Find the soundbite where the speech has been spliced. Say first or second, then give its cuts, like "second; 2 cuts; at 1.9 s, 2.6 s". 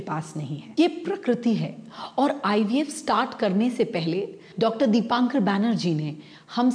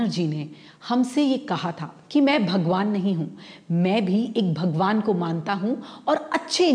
first; 1 cut; at 4.4 s